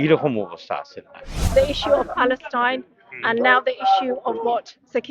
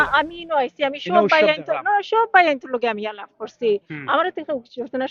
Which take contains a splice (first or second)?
first